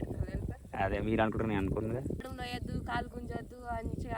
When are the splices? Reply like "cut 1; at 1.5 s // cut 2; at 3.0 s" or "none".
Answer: cut 1; at 2.3 s

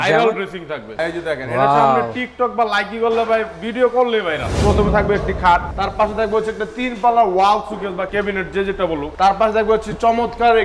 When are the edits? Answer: cut 1; at 4.5 s // cut 2; at 5.7 s

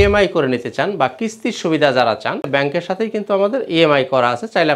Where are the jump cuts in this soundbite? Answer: cut 1; at 2.4 s

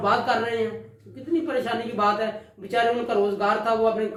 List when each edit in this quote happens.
none

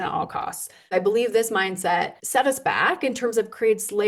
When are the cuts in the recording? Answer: cut 1; at 0.9 s // cut 2; at 2.2 s

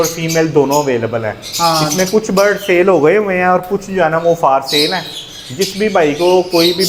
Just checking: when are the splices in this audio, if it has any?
none

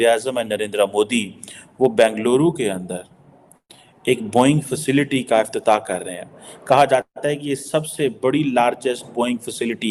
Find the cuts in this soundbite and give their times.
none

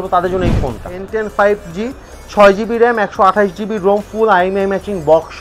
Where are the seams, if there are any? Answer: cut 1; at 1.0 s

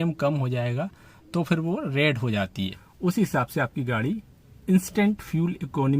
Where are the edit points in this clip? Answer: cut 1; at 2.8 s

